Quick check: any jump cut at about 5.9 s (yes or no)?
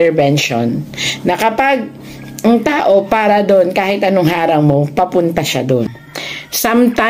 yes